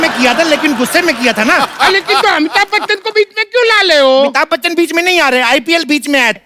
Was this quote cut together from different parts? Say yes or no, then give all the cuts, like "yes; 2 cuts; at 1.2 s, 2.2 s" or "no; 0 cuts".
no; 0 cuts